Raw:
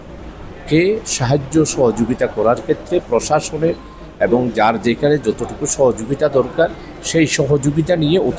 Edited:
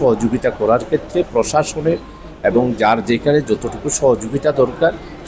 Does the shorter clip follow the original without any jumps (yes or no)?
yes